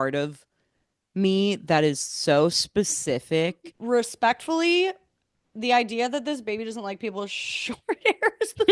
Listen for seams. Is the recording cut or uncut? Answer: cut